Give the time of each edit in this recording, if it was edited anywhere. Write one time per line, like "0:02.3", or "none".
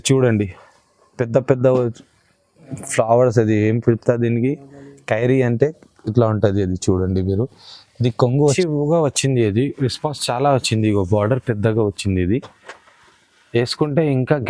0:08.5